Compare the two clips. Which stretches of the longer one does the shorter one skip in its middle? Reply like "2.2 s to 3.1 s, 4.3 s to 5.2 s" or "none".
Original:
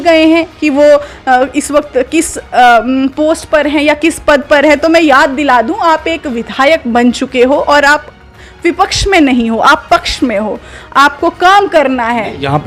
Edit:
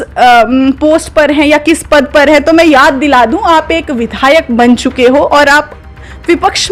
none